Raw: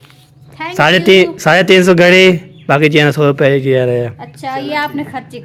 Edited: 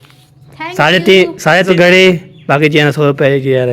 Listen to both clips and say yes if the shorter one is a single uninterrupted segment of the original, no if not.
no